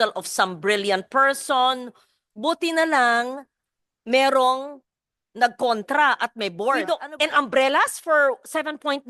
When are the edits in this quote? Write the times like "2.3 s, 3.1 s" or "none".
6.9 s